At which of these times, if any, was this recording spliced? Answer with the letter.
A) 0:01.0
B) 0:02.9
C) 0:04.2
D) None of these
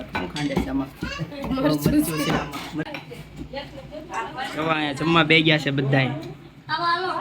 B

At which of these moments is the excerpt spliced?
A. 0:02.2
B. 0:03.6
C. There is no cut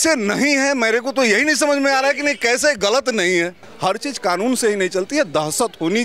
B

